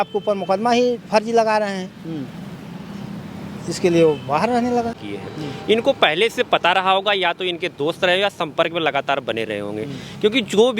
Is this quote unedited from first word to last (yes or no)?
no